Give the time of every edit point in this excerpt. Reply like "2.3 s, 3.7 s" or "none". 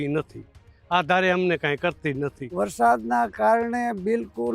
2.4 s